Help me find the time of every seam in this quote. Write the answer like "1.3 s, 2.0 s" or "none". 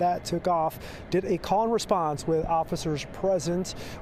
none